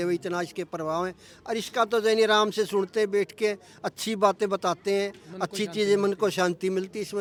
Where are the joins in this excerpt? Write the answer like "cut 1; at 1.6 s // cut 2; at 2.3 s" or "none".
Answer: none